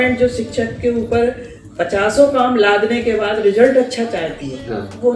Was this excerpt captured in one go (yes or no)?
yes